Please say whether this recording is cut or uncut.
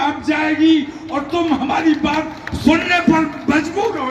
uncut